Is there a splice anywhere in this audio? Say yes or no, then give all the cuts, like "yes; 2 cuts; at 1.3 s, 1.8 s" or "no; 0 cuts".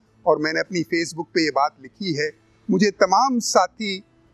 no; 0 cuts